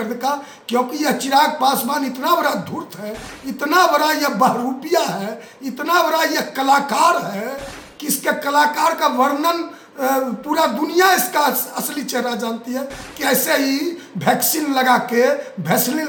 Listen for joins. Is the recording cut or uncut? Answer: uncut